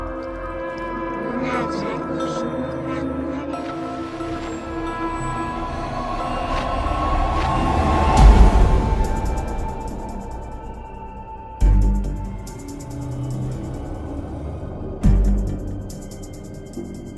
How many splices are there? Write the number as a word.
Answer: one